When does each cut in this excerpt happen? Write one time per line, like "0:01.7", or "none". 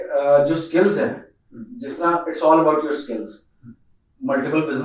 none